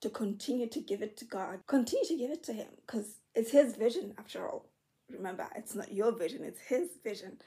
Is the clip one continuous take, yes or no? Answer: no